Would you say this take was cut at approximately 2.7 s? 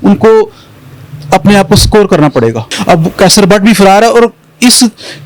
yes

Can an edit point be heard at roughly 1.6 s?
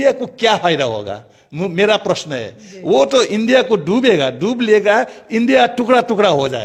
no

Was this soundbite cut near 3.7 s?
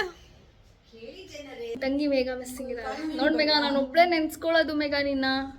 no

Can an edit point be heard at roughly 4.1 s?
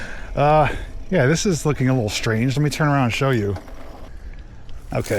yes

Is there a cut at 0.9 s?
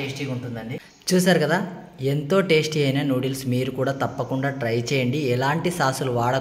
yes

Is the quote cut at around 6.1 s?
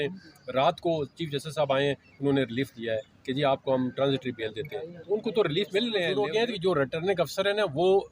yes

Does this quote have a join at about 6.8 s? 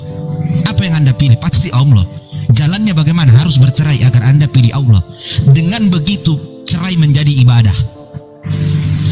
no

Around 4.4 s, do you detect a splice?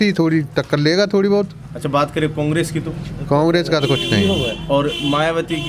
no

